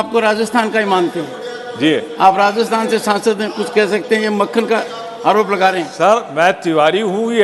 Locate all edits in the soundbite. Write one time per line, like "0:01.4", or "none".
none